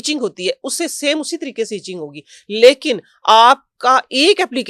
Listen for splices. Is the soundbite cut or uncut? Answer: uncut